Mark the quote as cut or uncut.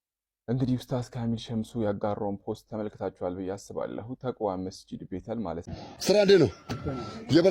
cut